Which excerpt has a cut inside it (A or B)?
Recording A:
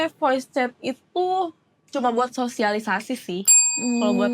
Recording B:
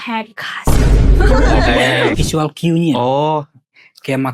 B